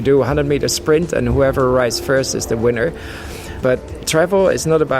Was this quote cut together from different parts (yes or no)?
yes